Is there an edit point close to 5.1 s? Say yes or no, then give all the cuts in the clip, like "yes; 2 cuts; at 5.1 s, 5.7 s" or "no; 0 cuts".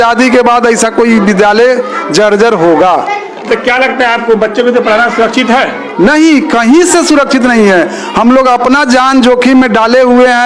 no; 0 cuts